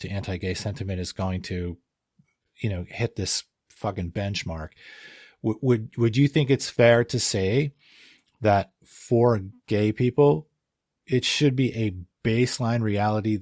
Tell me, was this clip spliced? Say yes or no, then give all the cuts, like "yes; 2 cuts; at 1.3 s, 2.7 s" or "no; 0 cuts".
no; 0 cuts